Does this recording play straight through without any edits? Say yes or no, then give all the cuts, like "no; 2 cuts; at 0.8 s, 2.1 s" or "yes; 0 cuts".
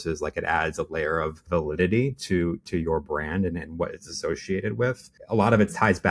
yes; 0 cuts